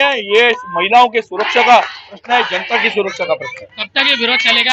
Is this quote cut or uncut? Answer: uncut